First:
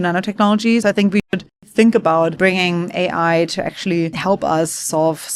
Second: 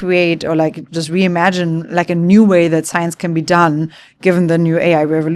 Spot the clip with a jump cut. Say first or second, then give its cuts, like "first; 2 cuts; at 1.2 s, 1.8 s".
first; 3 cuts; at 1.1 s, 2.3 s, 4.2 s